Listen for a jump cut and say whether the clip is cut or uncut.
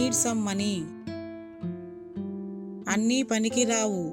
cut